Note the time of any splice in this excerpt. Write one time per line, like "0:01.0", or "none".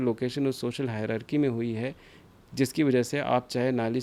none